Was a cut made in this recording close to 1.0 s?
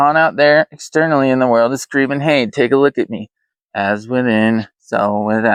no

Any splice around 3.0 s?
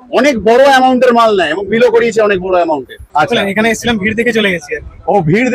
yes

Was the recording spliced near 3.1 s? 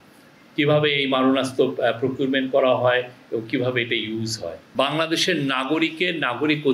no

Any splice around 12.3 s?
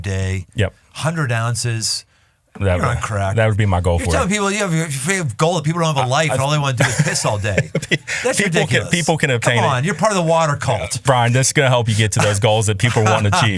no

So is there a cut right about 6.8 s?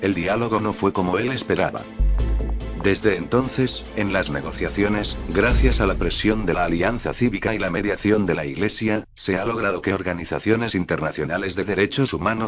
yes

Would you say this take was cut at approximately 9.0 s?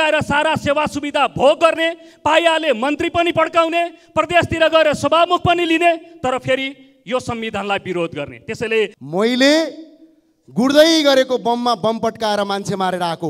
yes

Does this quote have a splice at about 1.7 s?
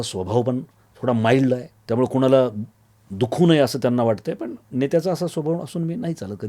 yes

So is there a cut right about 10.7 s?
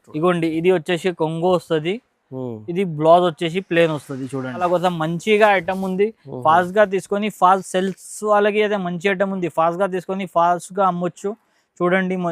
no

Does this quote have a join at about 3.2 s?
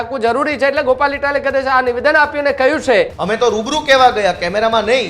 yes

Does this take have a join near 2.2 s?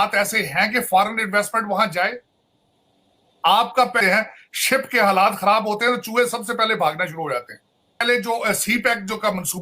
no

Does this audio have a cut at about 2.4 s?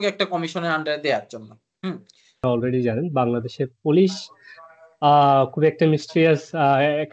yes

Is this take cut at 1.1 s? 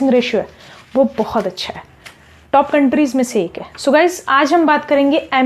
no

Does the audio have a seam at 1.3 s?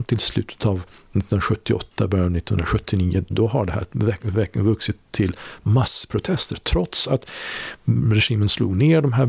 no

